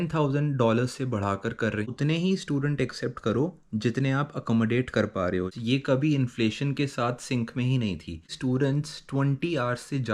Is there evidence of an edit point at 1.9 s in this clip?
yes; 3 cuts; at 1.9 s, 5.6 s, 8.3 s

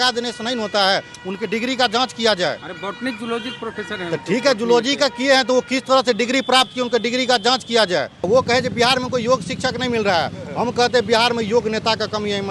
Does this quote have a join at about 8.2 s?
yes; 1 cut; at 8.2 s

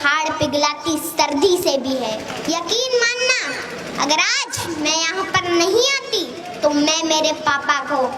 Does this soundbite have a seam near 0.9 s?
no; 1 cut; at 2.3 s

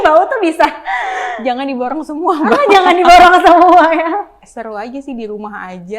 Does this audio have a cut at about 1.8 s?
no; 1 cut; at 4.4 s

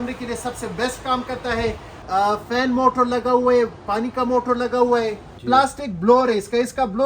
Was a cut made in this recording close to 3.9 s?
no; 2 cuts; at 1.9 s, 5.3 s

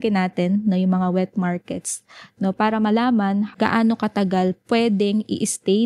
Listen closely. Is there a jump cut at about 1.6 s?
no; 2 cuts; at 3.5 s, 4.6 s

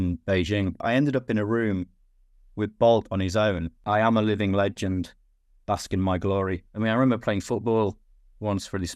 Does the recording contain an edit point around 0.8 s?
yes; 3 cuts; at 0.8 s, 3.7 s, 6.7 s

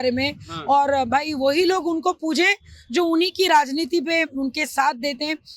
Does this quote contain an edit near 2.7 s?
no; 0 cuts

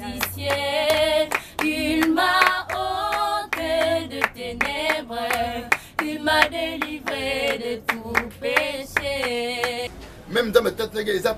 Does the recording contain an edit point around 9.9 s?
yes; 1 cut; at 9.9 s

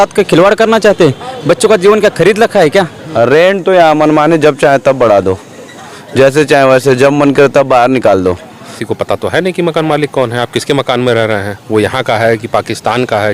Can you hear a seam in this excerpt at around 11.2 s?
no; 2 cuts; at 3.0 s, 8.7 s

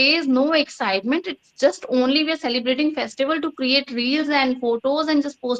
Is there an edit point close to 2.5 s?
no; 0 cuts

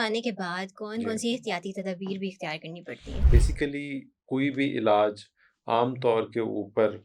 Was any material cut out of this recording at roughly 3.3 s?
yes; 1 cut; at 3.3 s

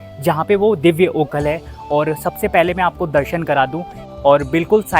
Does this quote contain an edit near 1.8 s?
no; 1 cut; at 4.0 s

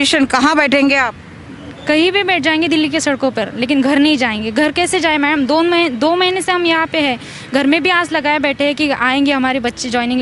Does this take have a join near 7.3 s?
no; 0 cuts

